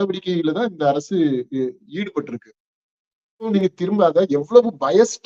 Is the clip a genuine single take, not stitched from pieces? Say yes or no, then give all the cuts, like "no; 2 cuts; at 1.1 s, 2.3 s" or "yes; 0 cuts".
no; 1 cut; at 3.5 s